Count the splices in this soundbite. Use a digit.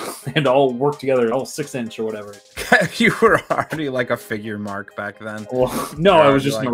1